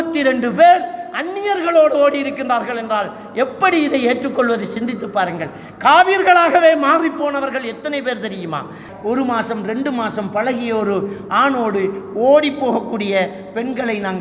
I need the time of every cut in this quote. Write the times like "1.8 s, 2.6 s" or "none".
8.9 s